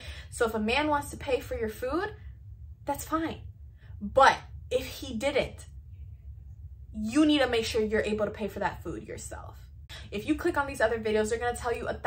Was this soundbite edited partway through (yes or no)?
yes